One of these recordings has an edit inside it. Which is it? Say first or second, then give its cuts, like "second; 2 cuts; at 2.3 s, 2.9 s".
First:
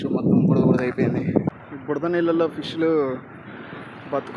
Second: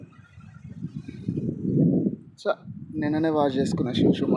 first; 1 cut; at 1.4 s